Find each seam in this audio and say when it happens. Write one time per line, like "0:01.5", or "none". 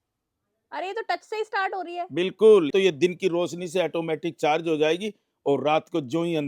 0:02.7